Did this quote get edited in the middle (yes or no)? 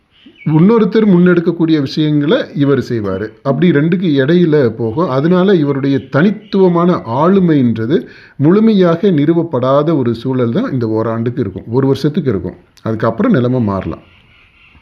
no